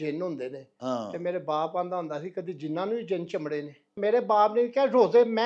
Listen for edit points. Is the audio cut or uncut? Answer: cut